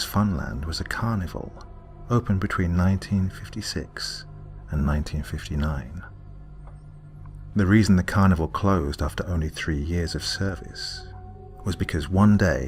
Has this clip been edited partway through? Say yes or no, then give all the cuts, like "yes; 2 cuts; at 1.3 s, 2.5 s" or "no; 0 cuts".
yes; 1 cut; at 4.0 s